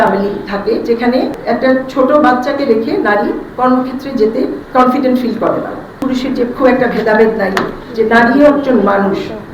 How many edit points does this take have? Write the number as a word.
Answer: three